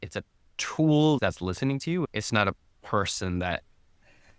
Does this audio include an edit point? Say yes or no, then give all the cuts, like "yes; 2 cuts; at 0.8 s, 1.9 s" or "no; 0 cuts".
yes; 1 cut; at 1.9 s